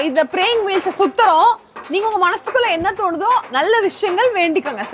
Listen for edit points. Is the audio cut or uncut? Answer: uncut